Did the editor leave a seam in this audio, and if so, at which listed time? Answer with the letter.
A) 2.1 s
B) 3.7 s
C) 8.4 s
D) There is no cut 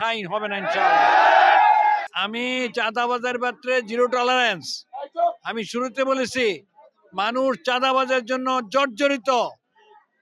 A